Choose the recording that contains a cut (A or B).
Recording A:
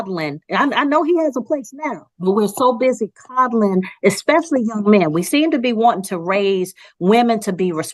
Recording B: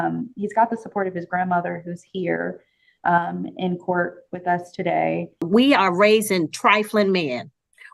B